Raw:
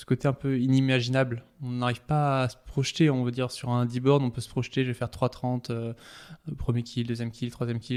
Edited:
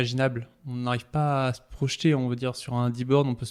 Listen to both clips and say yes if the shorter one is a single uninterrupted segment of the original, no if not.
yes